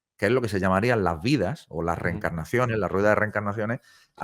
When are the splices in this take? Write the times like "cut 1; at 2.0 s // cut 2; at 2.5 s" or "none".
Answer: none